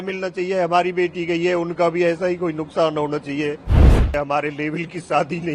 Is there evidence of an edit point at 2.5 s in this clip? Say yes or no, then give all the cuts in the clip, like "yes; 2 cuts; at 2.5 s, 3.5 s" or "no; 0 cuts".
no; 1 cut; at 4.0 s